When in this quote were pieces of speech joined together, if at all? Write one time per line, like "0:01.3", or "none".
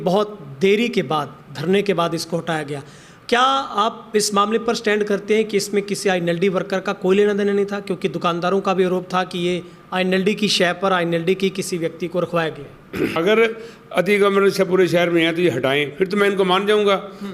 0:13.1